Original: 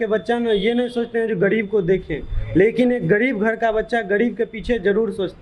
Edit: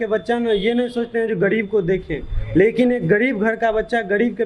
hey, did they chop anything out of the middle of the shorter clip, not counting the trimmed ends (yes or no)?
no